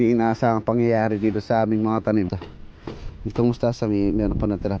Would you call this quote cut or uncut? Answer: cut